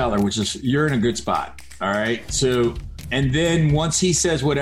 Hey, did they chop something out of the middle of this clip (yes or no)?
yes